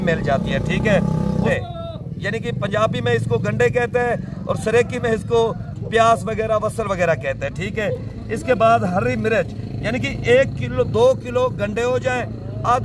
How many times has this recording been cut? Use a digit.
1